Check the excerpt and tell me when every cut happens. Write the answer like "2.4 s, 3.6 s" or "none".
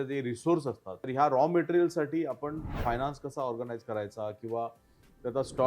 0.9 s